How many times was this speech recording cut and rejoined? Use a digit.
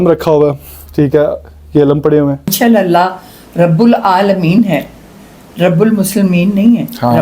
1